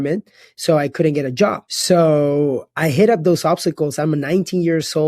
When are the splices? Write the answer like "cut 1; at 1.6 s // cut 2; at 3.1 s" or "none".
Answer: cut 1; at 1.7 s